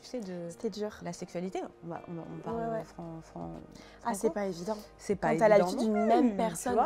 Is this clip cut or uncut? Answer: uncut